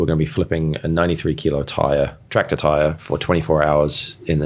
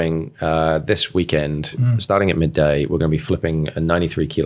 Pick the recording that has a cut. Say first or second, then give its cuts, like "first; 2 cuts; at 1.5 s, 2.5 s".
second; 1 cut; at 1.9 s